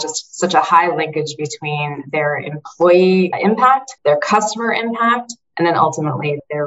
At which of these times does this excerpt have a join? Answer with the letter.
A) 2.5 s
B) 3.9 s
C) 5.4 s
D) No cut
B